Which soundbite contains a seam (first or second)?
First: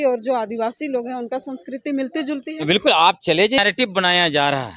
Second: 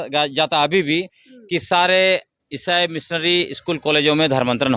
first